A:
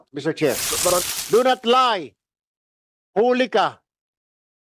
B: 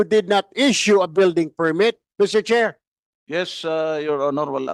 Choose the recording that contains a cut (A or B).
A